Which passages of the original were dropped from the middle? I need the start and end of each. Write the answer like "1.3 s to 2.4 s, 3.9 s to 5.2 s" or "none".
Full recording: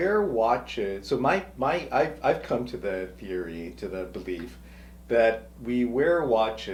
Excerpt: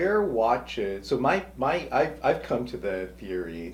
none